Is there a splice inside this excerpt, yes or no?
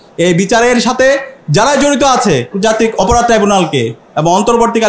yes